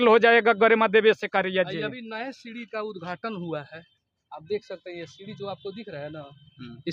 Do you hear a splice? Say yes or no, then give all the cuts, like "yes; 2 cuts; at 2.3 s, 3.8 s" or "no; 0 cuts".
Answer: no; 0 cuts